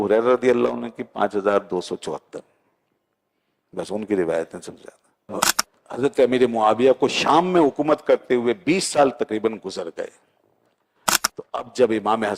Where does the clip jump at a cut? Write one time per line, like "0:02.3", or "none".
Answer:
0:05.3